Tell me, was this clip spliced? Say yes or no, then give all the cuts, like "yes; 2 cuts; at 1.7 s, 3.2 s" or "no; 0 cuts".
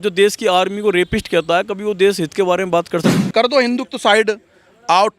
yes; 1 cut; at 3.1 s